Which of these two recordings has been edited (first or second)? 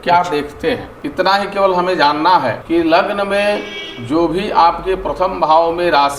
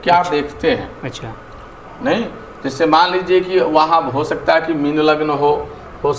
first